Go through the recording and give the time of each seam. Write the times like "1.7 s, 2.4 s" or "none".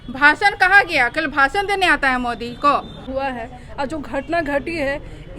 3.1 s